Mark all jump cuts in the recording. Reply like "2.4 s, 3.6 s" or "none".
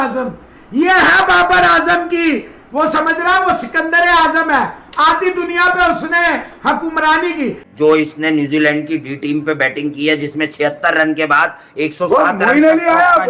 7.6 s

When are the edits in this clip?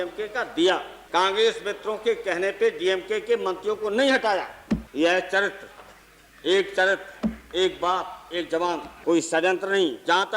0.9 s, 4.9 s, 8.9 s

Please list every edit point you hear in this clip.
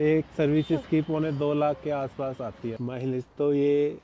2.7 s

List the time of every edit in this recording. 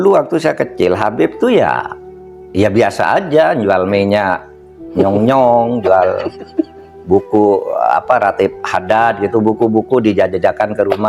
none

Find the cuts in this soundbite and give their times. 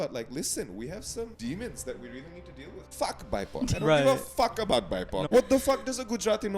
1.3 s, 2.8 s, 5.2 s

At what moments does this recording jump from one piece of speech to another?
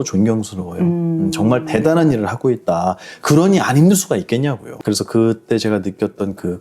4.7 s

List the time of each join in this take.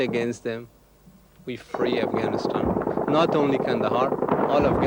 none

